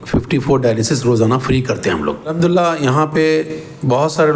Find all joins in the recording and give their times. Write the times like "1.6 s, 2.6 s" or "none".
2.3 s